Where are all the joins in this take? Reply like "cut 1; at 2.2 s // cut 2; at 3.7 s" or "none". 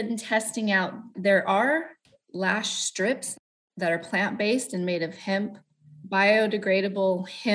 cut 1; at 1.1 s // cut 2; at 3.3 s // cut 3; at 5.9 s